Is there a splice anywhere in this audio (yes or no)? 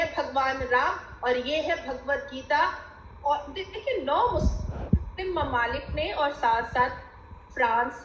yes